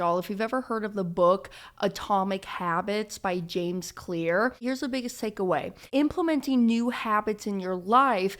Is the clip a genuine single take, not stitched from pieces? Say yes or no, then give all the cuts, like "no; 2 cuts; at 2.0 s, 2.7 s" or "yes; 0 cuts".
no; 2 cuts; at 4.6 s, 5.8 s